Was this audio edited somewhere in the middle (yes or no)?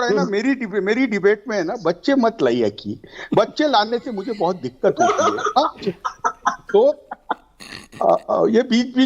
no